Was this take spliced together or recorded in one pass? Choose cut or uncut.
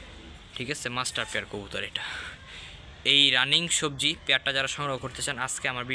uncut